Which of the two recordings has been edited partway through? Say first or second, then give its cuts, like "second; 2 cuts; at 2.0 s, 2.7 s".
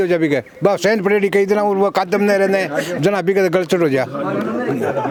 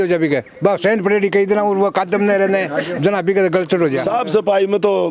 second; 1 cut; at 4.1 s